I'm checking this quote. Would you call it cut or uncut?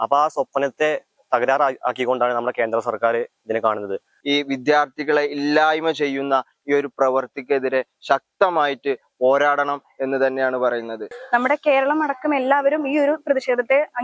cut